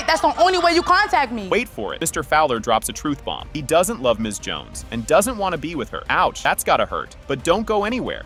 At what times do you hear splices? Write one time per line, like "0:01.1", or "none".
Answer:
none